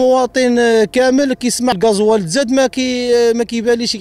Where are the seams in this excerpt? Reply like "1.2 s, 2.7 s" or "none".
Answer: 1.8 s